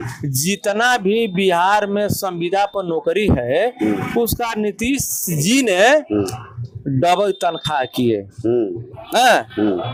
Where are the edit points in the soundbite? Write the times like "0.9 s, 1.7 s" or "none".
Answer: none